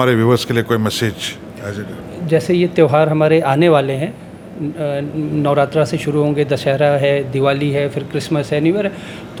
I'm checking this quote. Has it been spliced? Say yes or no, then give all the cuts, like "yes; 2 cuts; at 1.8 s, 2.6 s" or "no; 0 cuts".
no; 0 cuts